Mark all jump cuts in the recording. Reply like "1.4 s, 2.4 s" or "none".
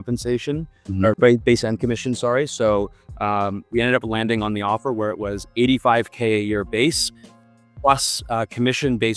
3.6 s